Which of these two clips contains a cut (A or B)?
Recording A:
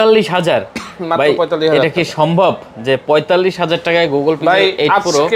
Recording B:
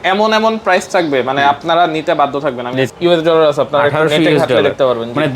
B